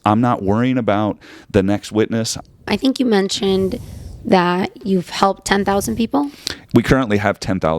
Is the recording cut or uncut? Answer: cut